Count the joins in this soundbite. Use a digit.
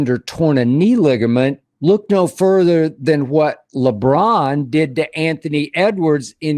1